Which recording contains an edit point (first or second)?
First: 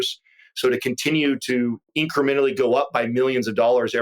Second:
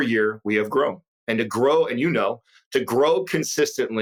first